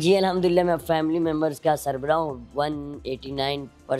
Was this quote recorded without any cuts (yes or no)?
yes